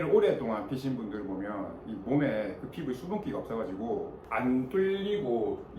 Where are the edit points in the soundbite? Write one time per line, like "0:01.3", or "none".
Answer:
0:04.2